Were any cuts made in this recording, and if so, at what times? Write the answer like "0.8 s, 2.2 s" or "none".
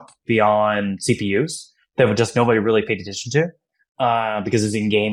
none